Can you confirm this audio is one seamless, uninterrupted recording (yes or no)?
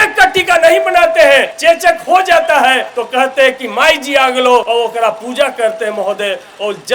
no